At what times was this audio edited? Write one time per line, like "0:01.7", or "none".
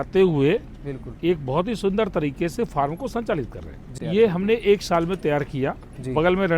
0:03.9